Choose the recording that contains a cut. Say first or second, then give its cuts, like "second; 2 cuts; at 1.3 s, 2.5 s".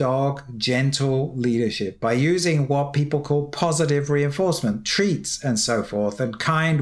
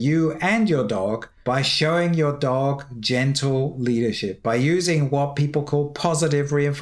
second; 1 cut; at 1.3 s